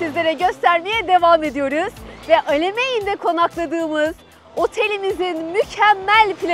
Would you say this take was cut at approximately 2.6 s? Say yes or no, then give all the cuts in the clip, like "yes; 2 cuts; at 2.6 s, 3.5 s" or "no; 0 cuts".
no; 0 cuts